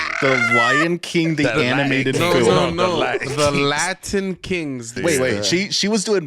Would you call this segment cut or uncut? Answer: cut